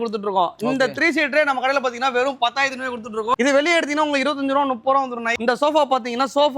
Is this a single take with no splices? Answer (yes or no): no